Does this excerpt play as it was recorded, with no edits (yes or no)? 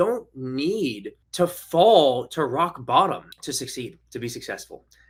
yes